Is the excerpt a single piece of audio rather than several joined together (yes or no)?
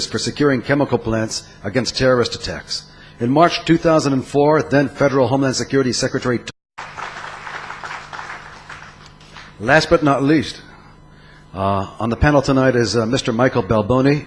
yes